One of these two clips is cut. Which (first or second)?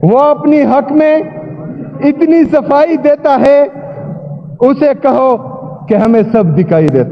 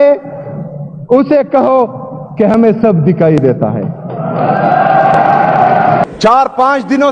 second